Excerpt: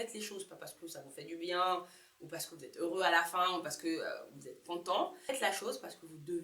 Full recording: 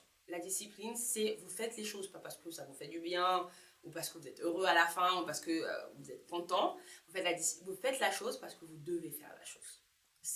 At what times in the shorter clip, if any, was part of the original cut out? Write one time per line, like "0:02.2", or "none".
0:05.3